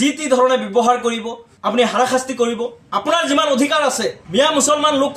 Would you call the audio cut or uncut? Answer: cut